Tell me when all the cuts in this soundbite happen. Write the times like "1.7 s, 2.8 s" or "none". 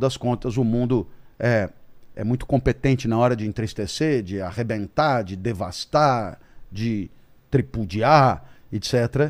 none

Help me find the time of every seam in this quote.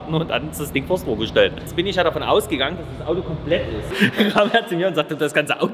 1.6 s, 3.9 s

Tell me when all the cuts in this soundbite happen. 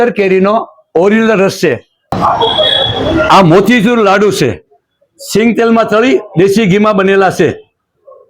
1.9 s

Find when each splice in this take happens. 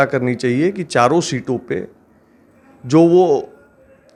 none

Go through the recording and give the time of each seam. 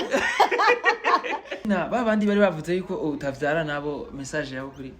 1.6 s

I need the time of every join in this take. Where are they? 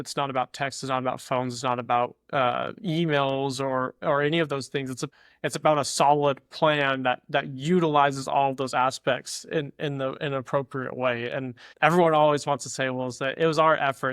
none

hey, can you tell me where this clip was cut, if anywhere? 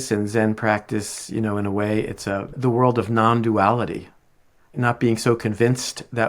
4.6 s

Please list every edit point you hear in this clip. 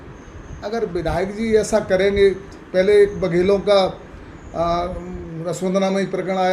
none

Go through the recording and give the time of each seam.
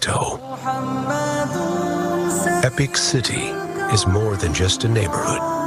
none

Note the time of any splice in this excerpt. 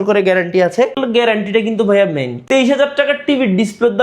1.0 s, 2.3 s

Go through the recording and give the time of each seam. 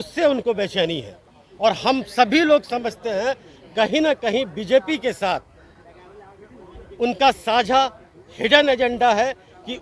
none

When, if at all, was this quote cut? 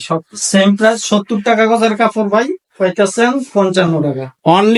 none

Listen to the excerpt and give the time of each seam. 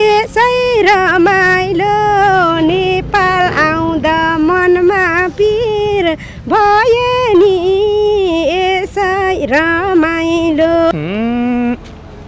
10.9 s

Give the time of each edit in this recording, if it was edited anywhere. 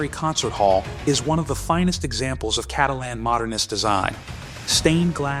none

